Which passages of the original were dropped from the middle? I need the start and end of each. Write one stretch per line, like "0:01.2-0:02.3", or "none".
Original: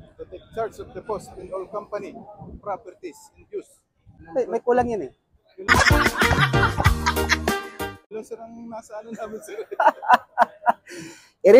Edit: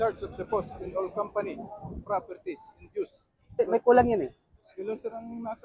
0:04.2-0:04.4
0:05.5-0:07.9